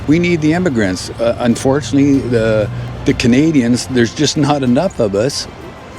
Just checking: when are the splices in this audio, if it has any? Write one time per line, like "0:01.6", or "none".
0:02.8